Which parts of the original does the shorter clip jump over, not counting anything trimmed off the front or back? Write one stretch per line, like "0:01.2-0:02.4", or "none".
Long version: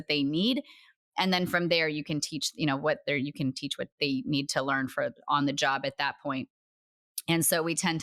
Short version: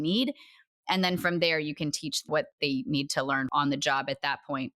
0:02.5-0:03.6
0:04.9-0:05.2